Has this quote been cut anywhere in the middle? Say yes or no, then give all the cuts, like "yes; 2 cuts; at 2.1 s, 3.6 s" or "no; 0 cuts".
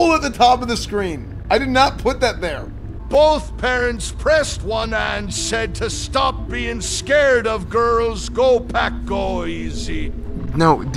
no; 0 cuts